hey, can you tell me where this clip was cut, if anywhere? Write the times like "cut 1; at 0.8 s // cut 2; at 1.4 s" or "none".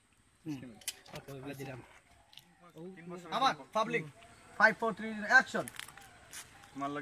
cut 1; at 3.0 s